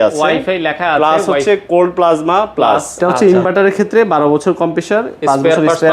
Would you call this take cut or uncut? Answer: cut